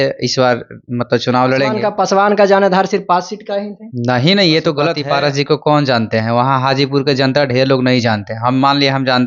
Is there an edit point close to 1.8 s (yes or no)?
yes